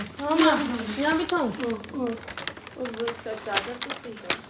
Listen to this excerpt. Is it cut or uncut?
uncut